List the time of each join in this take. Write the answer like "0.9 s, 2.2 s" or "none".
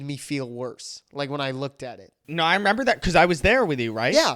2.2 s